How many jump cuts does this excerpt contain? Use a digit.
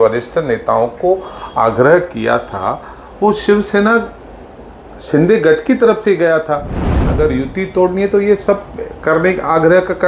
1